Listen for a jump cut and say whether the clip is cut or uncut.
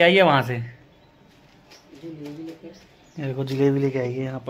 uncut